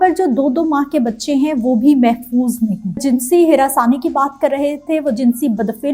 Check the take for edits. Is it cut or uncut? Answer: cut